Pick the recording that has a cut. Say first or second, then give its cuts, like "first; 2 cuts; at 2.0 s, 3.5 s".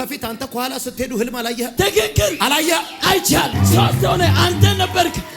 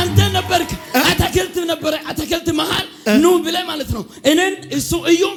first; 2 cuts; at 1.7 s, 3.5 s